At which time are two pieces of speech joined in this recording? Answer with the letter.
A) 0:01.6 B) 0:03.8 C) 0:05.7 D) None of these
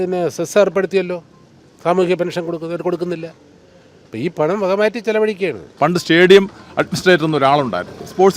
C